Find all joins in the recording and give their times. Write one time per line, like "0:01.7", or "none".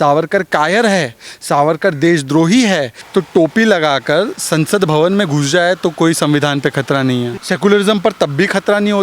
0:03.0
0:07.4

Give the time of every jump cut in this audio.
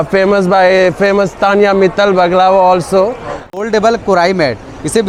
0:03.5

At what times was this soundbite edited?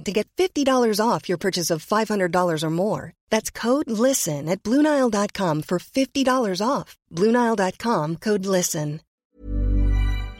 0:09.1

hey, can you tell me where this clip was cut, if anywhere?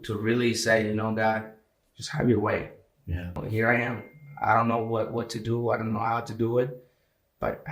0:03.4

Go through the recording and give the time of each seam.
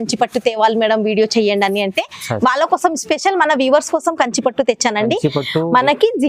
none

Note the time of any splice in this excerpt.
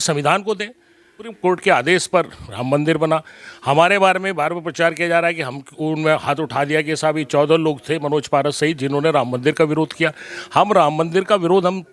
0:01.3

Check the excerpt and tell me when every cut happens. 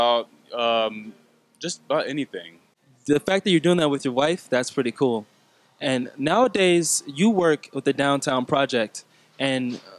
0:02.9

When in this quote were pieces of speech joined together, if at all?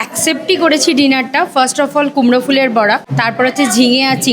0:03.1

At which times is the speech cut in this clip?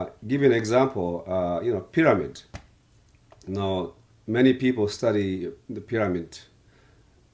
0:04.7

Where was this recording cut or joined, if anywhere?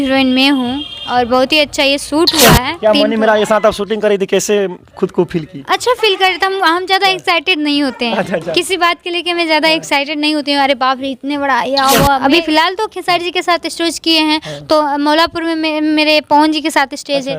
0:02.7
0:12.2

